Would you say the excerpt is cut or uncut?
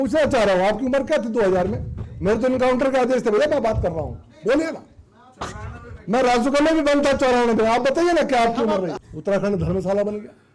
cut